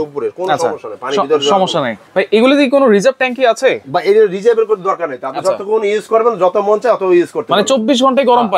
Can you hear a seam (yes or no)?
no